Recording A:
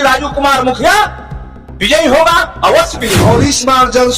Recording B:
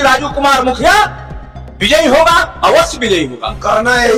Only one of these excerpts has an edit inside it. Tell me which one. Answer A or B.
A